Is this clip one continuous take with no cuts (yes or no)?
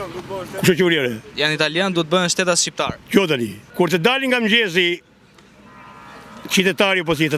no